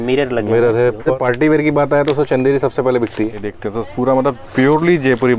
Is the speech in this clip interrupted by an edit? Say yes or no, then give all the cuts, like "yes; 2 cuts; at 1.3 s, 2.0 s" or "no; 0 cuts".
yes; 2 cuts; at 1.1 s, 3.4 s